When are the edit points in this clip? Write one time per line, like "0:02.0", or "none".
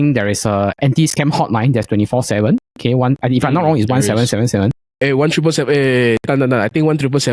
none